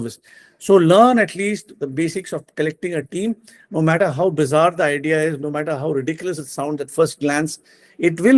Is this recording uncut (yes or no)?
yes